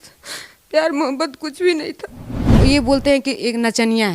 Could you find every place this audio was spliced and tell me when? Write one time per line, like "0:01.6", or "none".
0:02.6

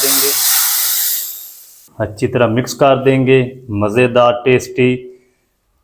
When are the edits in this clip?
0:01.8

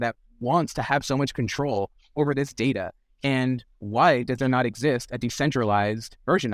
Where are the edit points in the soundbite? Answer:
none

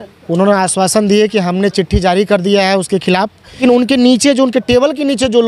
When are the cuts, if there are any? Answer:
0:03.6

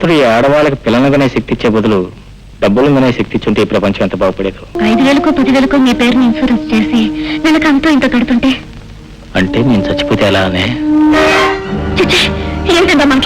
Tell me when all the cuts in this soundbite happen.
0:04.8

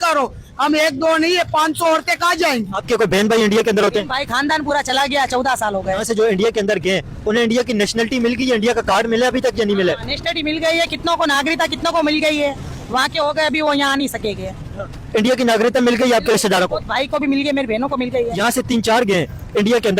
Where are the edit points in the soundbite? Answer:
0:02.8
0:06.0
0:18.4

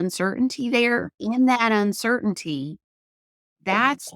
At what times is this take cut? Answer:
0:01.2

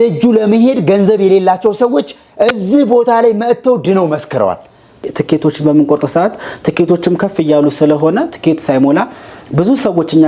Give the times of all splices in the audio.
0:05.1

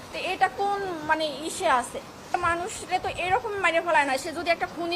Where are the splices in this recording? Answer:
0:02.3

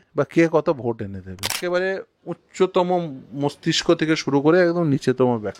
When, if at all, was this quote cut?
0:01.6

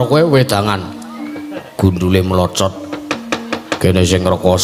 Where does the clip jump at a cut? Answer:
none

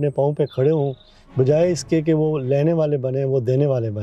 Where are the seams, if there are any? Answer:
none

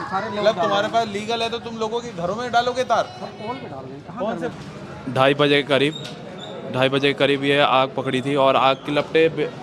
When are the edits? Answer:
0:04.5

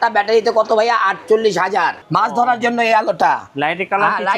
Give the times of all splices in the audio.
0:02.0

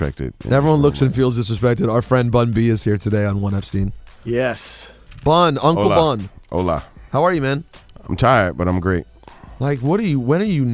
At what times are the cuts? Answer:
0:02.9

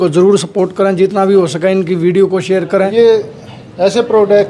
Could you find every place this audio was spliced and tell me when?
0:02.9

